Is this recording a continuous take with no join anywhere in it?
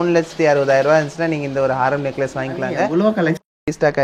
no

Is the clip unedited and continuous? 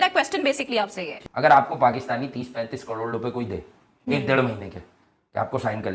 no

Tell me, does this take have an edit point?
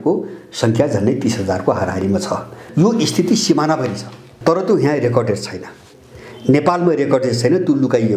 yes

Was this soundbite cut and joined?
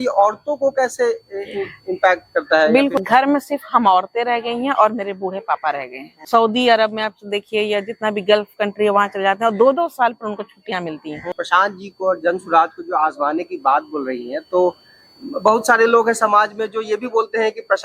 yes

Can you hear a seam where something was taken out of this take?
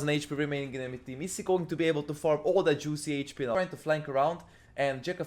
yes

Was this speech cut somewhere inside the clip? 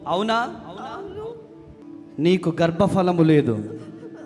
yes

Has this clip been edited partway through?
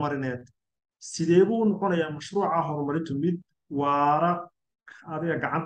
no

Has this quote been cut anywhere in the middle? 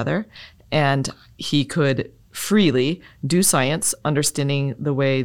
no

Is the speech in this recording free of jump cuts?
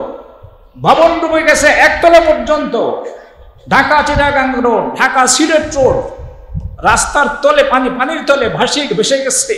yes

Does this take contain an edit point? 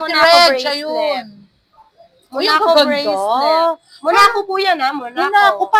no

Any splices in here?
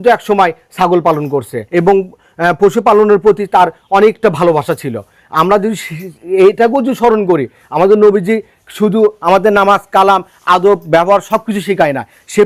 yes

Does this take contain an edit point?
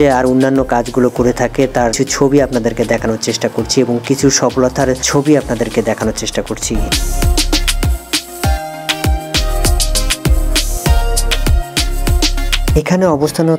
no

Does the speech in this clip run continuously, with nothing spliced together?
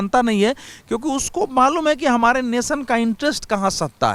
yes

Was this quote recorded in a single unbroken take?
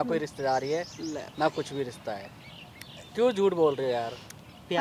yes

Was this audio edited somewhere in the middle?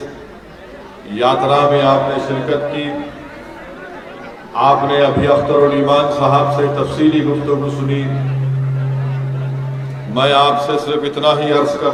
no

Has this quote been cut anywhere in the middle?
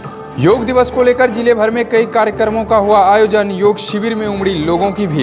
no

